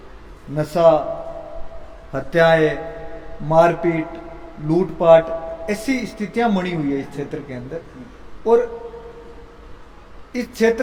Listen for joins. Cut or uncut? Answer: uncut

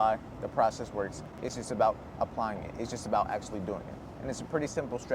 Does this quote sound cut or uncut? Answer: uncut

